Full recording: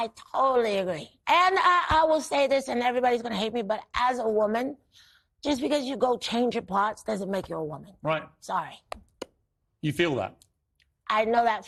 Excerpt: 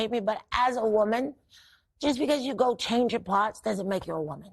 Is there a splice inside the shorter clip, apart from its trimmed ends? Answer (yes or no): no